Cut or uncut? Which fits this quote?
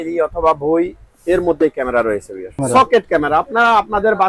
cut